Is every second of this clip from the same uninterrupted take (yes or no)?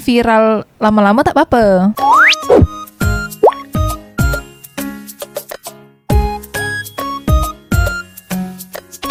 yes